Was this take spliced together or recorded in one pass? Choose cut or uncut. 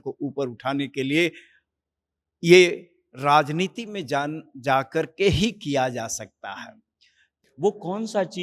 cut